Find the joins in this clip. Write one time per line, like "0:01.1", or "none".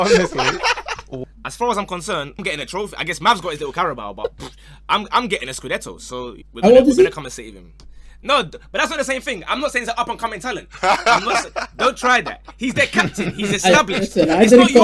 0:01.1
0:02.4
0:06.4